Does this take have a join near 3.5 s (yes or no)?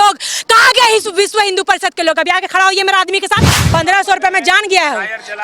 yes